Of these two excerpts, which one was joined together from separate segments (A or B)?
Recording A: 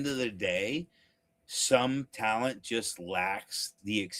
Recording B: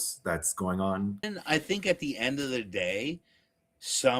B